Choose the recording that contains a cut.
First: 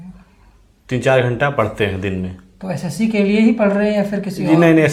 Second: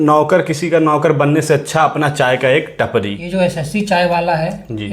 second; 1 cut; at 3.2 s

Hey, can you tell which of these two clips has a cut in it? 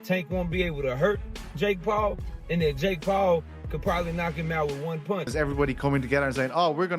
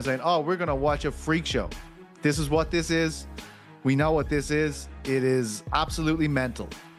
first; 1 cut; at 5.3 s

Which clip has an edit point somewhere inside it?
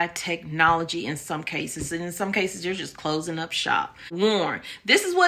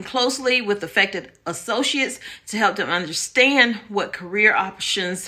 first; 1 cut; at 4.1 s

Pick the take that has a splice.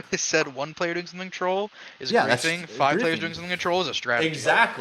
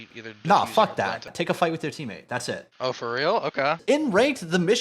second; 2 cuts; at 1.3 s, 3.8 s

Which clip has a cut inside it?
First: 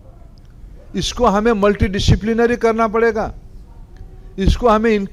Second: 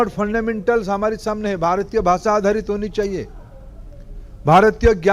second; 1 cut; at 2.6 s

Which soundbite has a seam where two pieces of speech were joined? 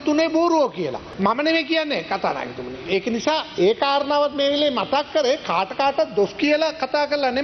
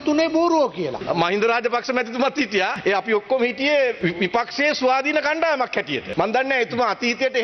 second; 4 cuts; at 1.0 s, 2.8 s, 4.0 s, 6.0 s

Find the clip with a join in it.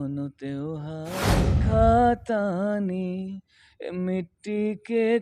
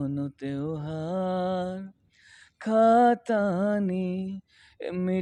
first; 1 cut; at 1.4 s

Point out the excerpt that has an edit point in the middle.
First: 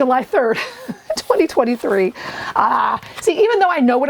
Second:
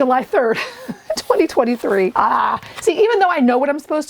second; 1 cut; at 2.1 s

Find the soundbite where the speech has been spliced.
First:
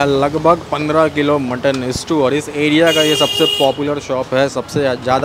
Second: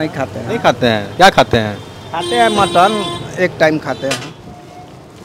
second; 1 cut; at 4.3 s

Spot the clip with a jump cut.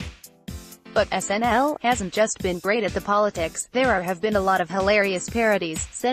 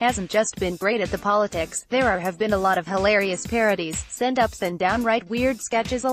first; 1 cut; at 0.9 s

